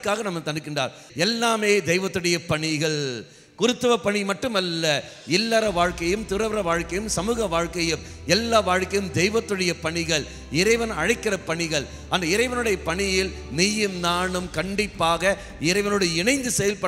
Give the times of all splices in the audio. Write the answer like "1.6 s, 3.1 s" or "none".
1.0 s